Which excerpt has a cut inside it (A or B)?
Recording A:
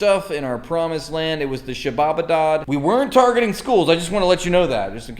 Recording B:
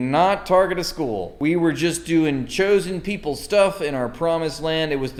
A